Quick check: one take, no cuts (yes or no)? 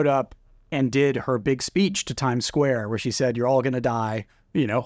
yes